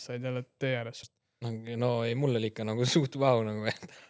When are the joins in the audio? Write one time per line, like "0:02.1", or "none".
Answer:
0:01.1

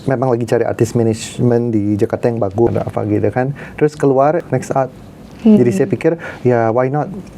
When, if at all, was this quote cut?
0:02.7
0:04.4

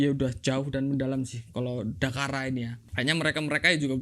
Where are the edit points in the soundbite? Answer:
0:02.8

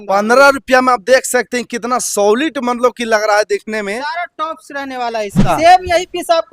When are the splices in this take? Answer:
0:05.5

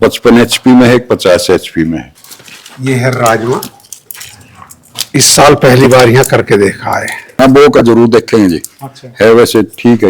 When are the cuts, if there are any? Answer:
0:02.1
0:07.3

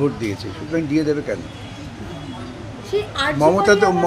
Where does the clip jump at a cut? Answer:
none

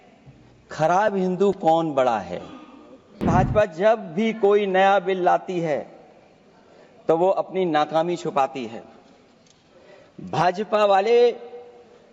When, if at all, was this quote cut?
0:03.2

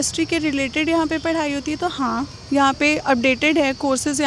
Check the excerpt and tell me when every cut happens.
none

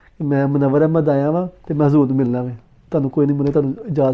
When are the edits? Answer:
0:01.6

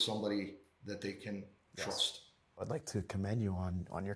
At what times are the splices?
0:02.6

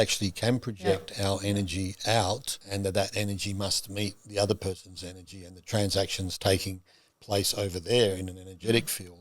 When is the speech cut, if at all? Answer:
0:02.6

